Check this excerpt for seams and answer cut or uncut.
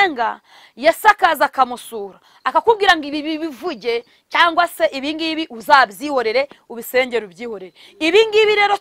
uncut